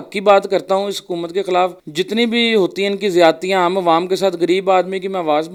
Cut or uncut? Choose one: uncut